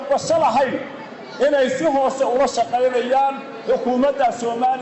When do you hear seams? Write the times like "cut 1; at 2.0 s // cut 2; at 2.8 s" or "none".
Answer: none